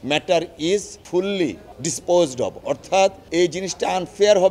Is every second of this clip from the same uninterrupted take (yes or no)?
no